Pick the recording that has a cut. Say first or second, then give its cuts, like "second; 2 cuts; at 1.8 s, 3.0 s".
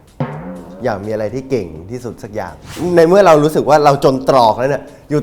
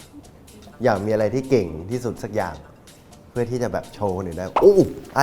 first; 1 cut; at 2.8 s